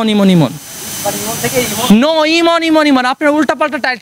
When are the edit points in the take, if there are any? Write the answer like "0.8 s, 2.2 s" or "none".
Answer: none